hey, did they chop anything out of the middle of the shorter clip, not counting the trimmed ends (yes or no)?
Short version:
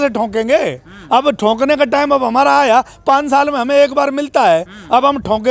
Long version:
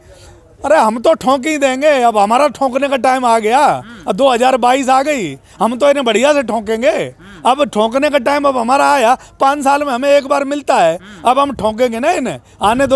no